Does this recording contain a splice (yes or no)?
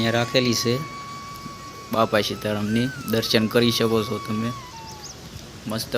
no